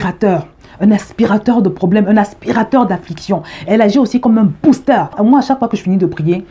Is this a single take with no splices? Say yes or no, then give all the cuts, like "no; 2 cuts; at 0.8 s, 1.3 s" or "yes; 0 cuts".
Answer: yes; 0 cuts